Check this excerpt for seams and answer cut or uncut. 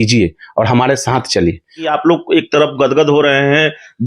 cut